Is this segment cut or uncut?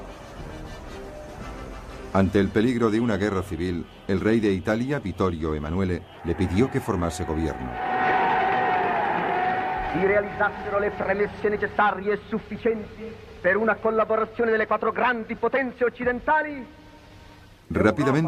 uncut